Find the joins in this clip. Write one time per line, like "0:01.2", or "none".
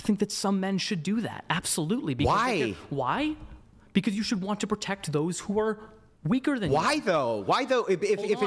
none